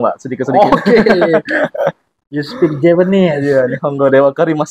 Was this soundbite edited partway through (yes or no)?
no